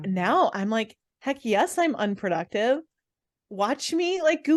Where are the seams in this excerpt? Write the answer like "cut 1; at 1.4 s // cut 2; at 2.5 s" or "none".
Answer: none